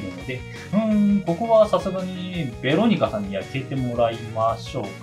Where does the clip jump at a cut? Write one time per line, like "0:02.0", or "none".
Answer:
none